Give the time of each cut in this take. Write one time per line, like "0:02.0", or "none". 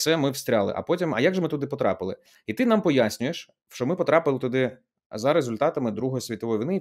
none